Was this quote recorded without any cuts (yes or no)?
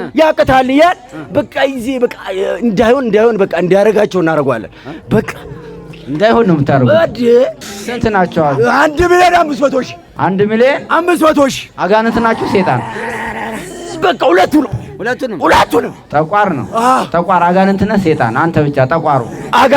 no